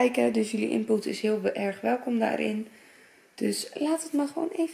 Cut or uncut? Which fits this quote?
uncut